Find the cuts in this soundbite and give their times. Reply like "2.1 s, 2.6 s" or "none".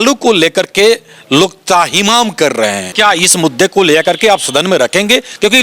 2.9 s